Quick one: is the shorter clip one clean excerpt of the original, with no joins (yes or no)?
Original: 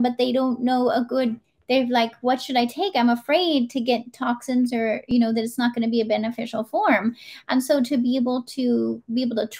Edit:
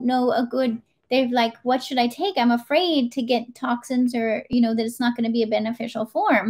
yes